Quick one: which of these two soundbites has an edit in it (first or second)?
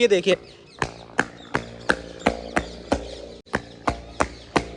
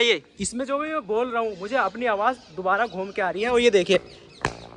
first